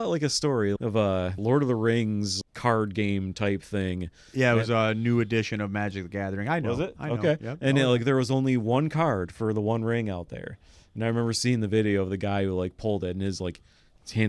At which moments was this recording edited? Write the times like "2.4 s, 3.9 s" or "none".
1.3 s, 2.3 s